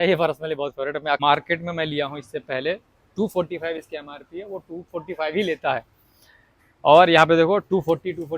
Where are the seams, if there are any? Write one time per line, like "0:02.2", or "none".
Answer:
0:01.2

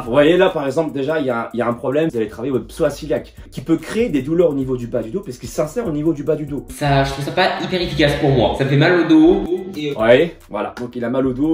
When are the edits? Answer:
0:02.1
0:03.5
0:06.7

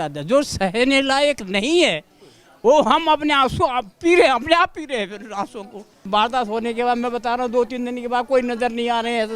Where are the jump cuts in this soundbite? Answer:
0:06.0

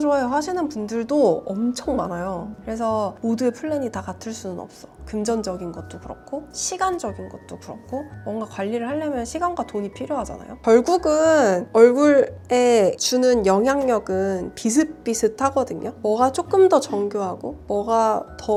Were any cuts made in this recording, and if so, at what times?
none

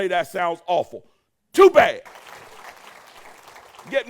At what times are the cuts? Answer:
0:02.1

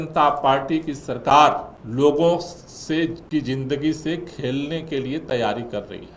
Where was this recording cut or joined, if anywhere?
0:01.8

